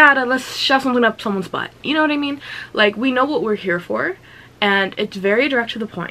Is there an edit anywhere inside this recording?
no; 0 cuts

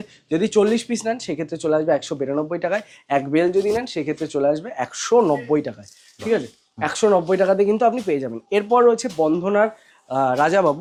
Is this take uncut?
yes; 0 cuts

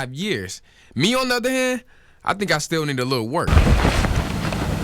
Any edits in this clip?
yes; 1 cut; at 3.5 s

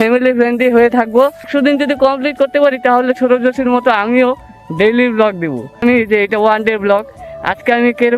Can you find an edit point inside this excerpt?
yes; 2 cuts; at 1.5 s, 5.8 s

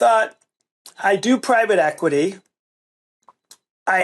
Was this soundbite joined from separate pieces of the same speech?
no; 0 cuts

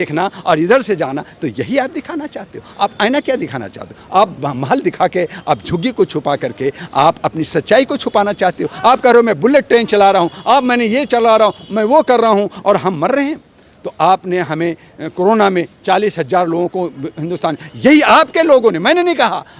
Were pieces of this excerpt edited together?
no; 0 cuts

